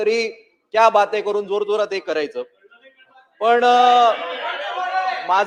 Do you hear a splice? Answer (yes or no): no